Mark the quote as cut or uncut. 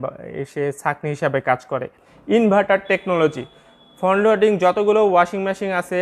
cut